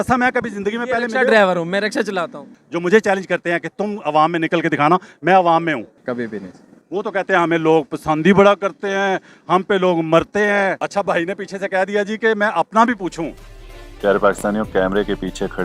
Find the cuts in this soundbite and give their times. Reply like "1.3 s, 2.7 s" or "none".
2.5 s, 6.0 s, 10.8 s